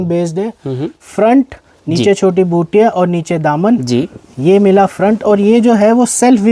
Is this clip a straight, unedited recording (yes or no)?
yes